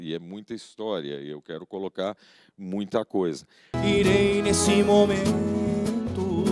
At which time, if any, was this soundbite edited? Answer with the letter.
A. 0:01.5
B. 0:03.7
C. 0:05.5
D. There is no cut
B